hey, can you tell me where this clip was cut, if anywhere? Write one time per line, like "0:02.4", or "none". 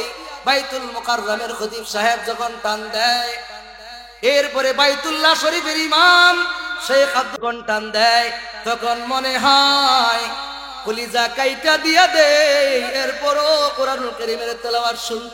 0:07.3